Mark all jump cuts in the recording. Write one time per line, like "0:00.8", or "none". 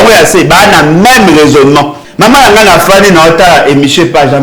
0:02.0